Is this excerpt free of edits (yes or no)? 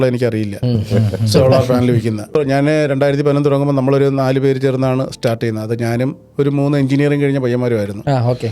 no